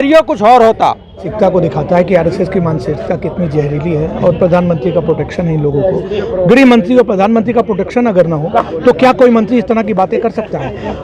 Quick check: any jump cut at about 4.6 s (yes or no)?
no